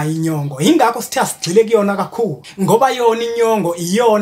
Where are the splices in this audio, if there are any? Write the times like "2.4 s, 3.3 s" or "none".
2.4 s